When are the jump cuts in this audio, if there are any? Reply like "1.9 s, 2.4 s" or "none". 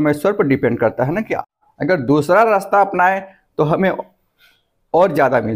1.4 s